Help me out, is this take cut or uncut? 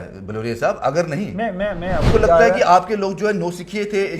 cut